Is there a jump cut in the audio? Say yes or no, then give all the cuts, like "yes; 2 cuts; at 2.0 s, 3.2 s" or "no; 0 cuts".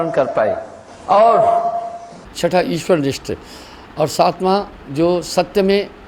no; 0 cuts